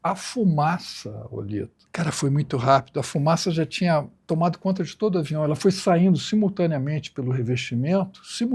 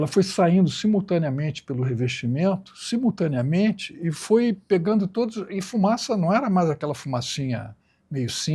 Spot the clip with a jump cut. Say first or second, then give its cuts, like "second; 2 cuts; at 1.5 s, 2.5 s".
first; 2 cuts; at 1.8 s, 4.2 s